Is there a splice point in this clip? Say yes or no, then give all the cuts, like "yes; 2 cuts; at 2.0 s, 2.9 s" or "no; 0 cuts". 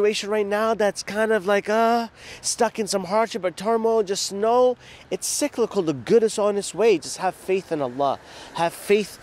no; 0 cuts